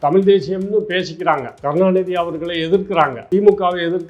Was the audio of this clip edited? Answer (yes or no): yes